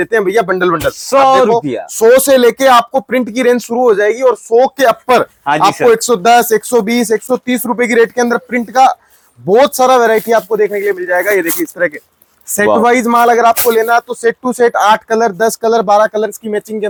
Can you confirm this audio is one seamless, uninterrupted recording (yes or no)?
yes